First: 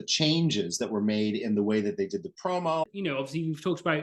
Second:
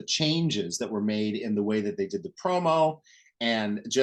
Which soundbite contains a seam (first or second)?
first